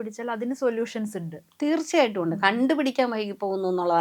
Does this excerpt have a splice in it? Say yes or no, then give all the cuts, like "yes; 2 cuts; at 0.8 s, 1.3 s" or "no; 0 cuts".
no; 0 cuts